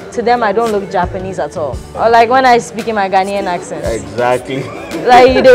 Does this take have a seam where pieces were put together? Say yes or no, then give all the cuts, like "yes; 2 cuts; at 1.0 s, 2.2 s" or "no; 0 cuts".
yes; 1 cut; at 1.8 s